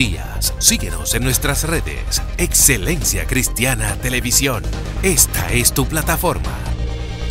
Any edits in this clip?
no; 0 cuts

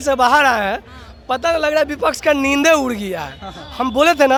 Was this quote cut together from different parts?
no; 0 cuts

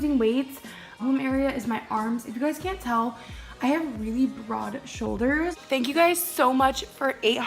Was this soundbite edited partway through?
yes; 2 cuts; at 1.0 s, 5.6 s

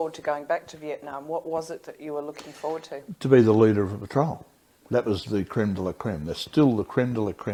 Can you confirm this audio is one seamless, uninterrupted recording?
yes; 0 cuts

